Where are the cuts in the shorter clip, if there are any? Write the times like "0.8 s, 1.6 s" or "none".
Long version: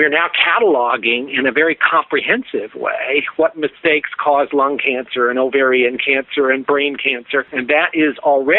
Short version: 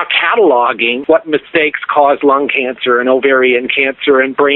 1.0 s